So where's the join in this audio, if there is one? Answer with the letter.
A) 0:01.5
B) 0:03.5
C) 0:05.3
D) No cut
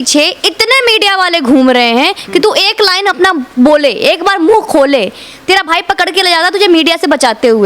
D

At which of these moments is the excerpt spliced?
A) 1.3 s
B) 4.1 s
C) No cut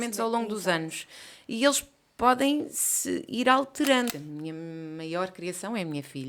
B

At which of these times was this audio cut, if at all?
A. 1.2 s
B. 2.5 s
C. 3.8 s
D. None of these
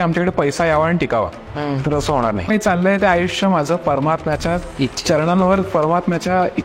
B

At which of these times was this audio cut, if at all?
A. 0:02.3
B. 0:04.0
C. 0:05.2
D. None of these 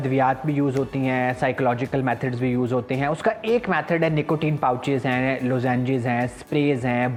D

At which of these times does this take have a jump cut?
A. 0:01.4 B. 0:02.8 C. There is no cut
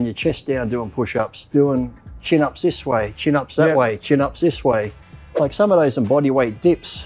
A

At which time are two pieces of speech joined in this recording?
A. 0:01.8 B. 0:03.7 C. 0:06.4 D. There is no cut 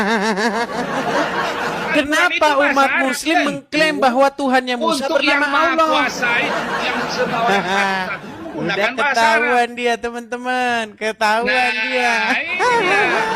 A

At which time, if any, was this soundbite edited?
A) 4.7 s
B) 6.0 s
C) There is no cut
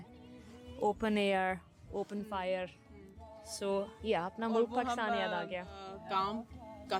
B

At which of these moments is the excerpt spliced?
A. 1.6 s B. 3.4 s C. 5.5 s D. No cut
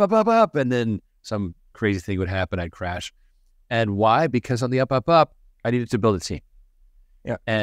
C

